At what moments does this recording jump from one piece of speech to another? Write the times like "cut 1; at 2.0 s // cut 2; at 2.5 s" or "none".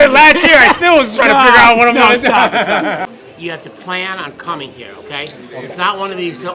cut 1; at 3.1 s